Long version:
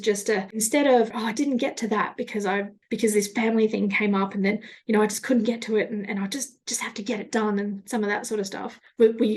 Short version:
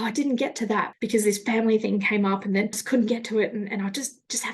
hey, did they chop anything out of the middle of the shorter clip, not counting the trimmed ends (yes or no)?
yes